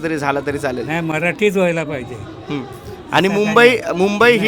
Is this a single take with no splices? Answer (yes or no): yes